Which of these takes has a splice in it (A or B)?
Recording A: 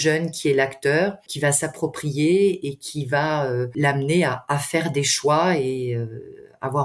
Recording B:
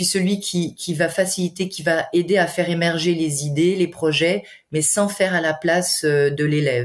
A